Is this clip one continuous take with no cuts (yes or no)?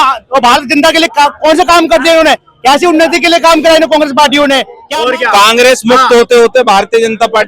no